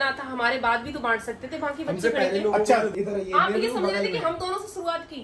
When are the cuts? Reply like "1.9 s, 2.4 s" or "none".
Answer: 2.9 s